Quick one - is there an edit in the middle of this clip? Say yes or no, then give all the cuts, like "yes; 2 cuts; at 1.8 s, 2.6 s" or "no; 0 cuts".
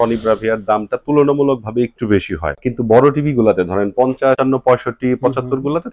yes; 2 cuts; at 2.6 s, 4.4 s